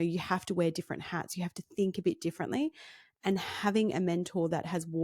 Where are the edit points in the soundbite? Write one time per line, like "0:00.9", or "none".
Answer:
none